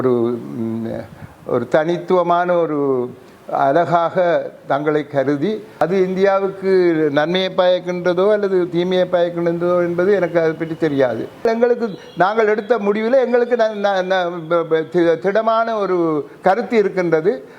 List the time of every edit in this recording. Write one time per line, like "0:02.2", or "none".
0:05.7
0:11.4